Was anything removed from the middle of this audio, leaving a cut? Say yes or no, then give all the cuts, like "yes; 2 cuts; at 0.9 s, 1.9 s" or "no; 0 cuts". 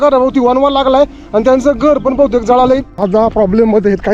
yes; 1 cut; at 2.9 s